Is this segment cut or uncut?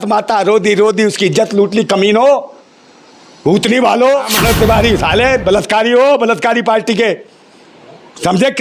cut